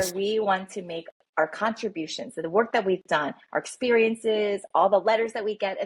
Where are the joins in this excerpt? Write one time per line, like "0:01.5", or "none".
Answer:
none

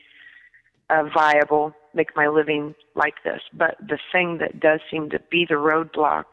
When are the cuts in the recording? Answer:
none

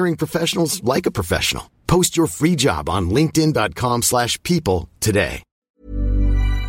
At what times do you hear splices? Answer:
0:05.5

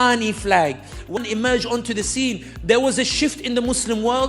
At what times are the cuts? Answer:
0:01.2

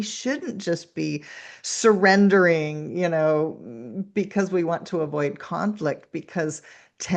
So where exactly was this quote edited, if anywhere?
none

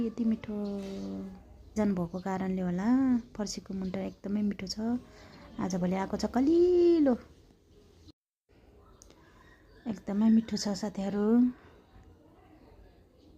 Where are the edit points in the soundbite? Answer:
0:01.8

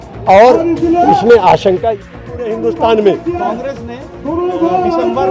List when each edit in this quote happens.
0:01.8

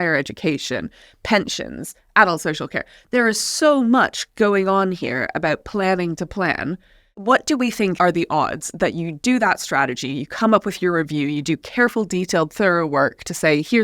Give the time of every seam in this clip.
0:07.2
0:07.9

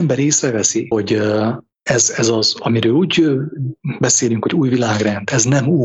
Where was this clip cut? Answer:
0:00.9
0:01.7

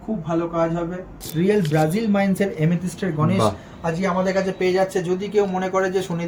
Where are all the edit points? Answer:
0:01.2

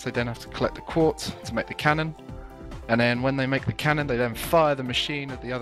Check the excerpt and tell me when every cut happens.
none

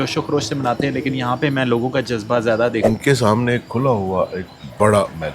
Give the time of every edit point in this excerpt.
0:02.8

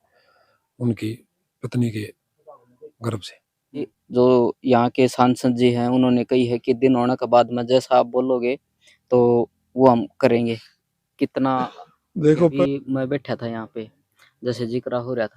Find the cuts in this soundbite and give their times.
0:04.0
0:12.4

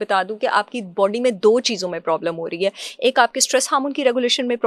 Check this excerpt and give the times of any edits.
none

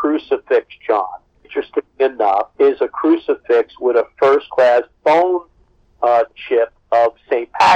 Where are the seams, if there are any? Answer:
none

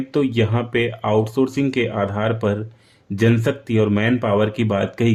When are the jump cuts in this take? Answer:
none

